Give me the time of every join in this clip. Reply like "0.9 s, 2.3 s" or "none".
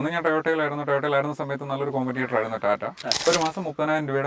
3.1 s